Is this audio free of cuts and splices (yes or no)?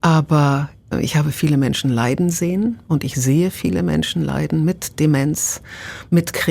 no